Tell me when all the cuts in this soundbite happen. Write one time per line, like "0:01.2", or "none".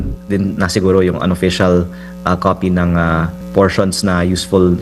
0:03.4